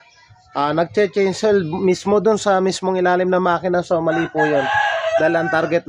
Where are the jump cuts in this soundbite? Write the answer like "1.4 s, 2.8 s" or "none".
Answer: none